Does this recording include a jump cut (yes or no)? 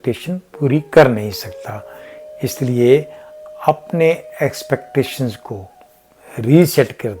no